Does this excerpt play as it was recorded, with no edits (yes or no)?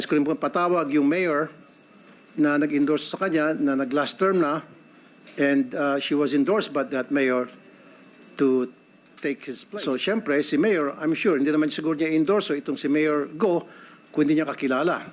no